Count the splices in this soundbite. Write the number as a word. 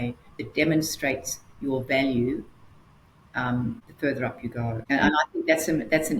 two